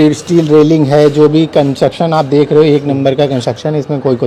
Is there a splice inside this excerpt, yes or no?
no